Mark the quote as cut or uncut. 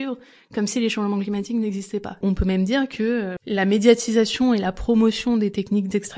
cut